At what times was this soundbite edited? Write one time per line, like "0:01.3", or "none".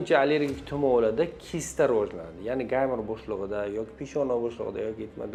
none